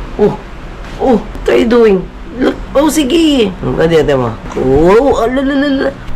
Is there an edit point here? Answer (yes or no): yes